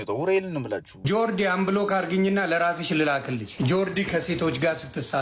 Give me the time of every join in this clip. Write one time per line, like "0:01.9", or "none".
0:00.9
0:03.5